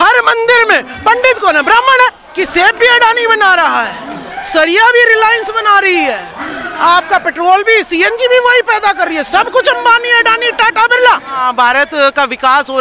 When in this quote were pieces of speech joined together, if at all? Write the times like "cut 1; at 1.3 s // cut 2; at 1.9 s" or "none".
cut 1; at 2.2 s // cut 2; at 11.4 s